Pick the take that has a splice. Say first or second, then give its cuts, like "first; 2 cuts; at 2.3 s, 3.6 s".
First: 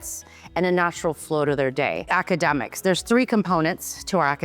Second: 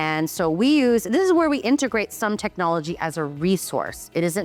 first; 1 cut; at 2.0 s